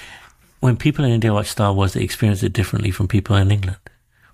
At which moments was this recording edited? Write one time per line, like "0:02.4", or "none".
none

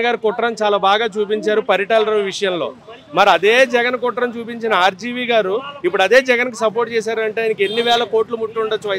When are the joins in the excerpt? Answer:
none

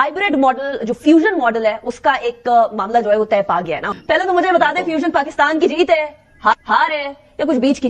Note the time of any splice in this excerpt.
0:03.9

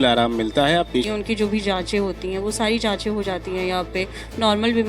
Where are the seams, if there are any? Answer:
0:01.1

